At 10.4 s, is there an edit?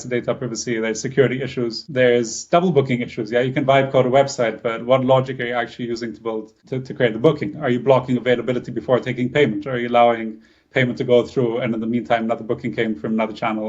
no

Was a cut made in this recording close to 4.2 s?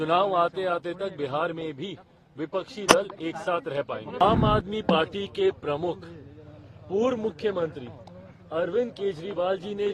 yes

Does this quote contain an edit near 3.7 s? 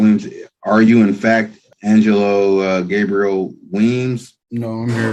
no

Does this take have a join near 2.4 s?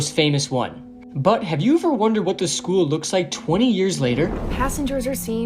no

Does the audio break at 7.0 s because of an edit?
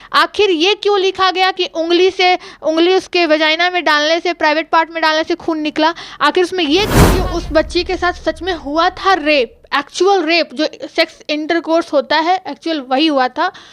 yes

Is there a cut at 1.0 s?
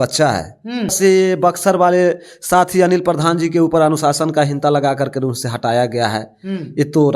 yes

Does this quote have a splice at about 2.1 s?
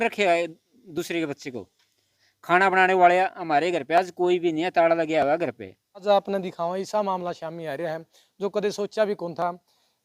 yes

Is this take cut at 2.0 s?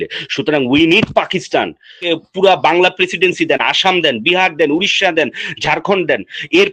yes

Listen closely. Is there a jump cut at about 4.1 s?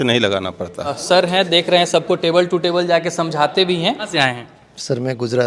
yes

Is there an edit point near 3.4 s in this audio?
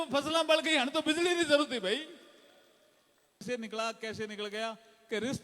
yes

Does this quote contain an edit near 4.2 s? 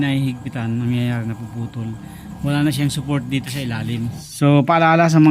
yes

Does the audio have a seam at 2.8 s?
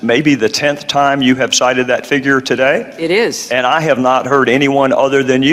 yes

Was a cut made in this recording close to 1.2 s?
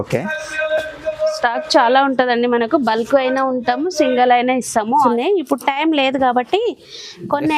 no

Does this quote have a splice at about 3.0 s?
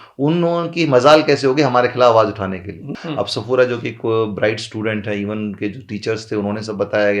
yes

